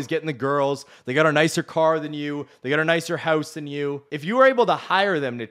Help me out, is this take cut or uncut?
cut